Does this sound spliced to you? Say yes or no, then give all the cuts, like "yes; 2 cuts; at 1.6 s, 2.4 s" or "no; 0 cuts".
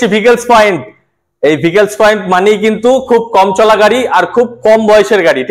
no; 0 cuts